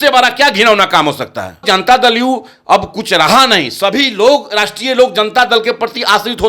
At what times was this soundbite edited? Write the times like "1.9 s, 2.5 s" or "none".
1.6 s